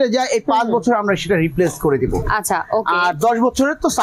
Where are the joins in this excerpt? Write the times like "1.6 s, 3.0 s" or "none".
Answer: none